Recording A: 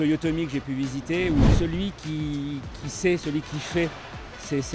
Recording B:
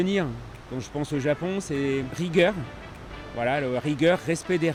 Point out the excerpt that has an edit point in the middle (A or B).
A